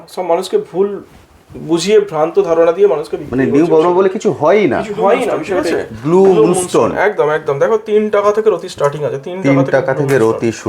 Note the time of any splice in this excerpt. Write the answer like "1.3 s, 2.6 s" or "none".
5.6 s